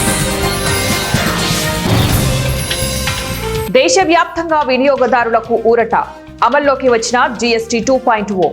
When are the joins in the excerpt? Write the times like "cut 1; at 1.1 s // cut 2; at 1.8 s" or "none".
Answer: cut 1; at 3.7 s